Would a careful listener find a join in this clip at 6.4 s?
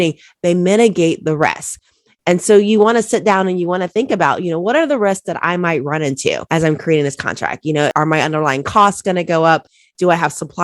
yes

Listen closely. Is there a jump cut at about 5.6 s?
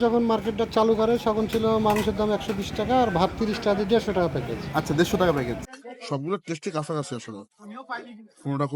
yes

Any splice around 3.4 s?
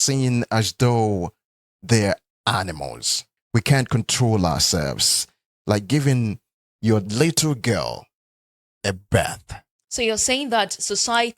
yes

